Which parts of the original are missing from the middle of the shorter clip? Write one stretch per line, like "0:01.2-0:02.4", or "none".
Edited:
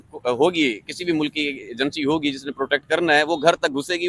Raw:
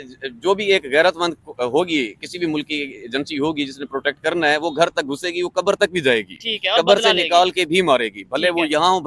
none